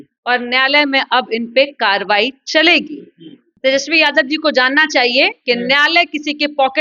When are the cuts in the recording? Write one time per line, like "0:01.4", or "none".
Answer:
0:03.4